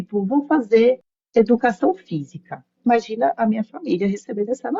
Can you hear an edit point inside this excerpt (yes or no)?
yes